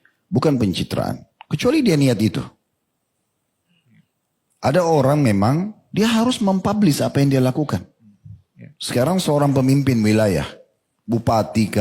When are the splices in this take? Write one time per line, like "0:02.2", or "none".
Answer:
none

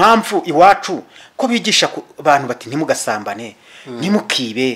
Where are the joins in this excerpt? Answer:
none

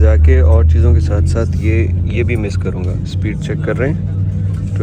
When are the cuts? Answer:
none

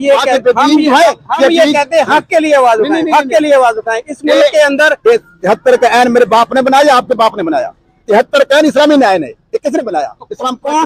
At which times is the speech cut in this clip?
0:05.0

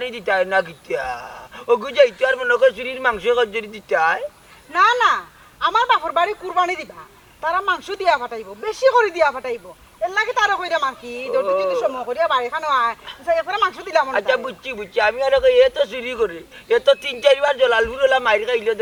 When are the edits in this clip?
none

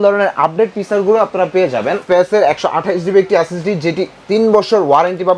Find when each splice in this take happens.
0:02.0

